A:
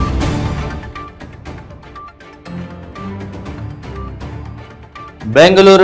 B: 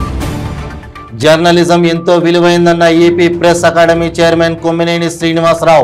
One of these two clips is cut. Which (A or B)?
A